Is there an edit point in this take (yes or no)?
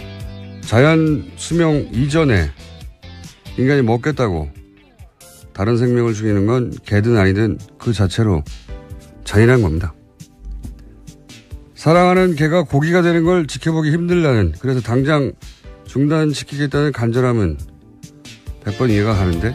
yes